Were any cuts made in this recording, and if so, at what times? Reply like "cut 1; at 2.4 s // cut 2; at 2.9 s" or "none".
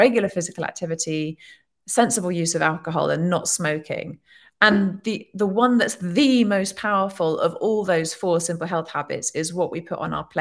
none

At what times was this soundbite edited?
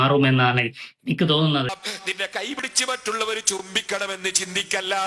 cut 1; at 1.9 s

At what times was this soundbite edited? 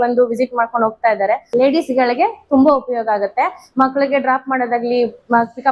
cut 1; at 1.4 s

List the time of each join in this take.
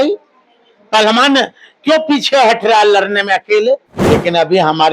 cut 1; at 3.9 s

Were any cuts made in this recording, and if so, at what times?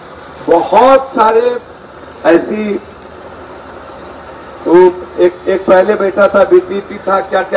none

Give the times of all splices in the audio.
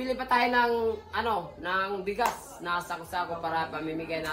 none

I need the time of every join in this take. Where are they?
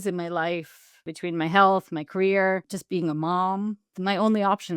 cut 1; at 1.1 s // cut 2; at 2.8 s // cut 3; at 3.9 s

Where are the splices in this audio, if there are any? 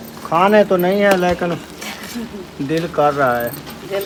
none

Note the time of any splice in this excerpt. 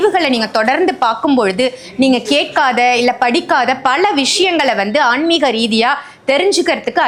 none

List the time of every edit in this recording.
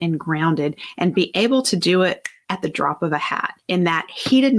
cut 1; at 0.8 s // cut 2; at 2.3 s // cut 3; at 3.5 s

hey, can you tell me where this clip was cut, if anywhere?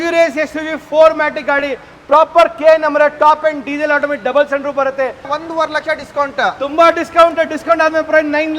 cut 1; at 5.3 s

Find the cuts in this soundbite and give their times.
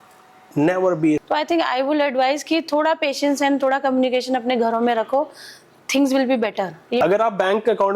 cut 1; at 1.2 s // cut 2; at 6.8 s

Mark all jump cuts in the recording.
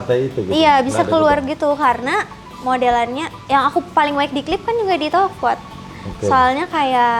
none

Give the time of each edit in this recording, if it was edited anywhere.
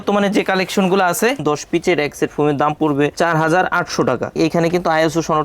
cut 1; at 1.4 s // cut 2; at 3.1 s // cut 3; at 4.3 s

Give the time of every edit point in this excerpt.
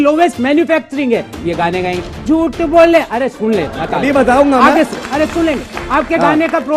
none

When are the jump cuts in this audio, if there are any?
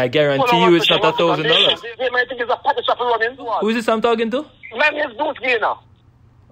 cut 1; at 1.9 s // cut 2; at 3.5 s

